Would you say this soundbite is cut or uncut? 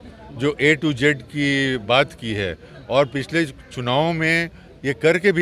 uncut